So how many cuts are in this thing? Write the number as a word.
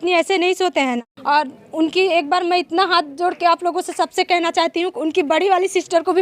one